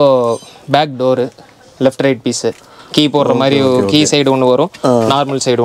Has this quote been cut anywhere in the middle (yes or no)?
yes